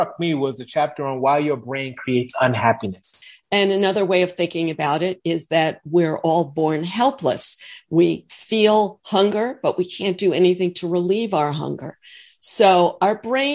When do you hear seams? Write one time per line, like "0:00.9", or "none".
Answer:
0:03.2

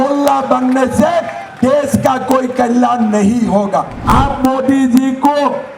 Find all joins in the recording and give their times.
0:03.9

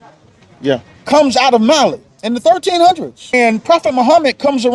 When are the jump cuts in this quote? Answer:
0:02.1
0:03.3

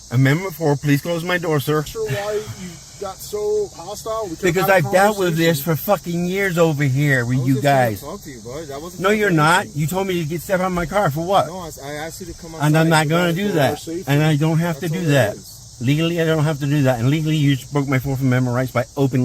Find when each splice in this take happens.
0:01.9

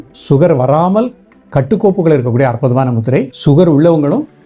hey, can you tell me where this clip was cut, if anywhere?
0:03.3

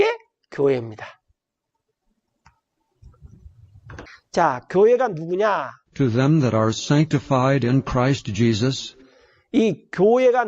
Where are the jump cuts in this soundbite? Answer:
0:03.9

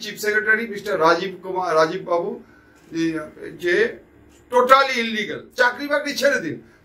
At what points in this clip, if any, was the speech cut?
0:05.4

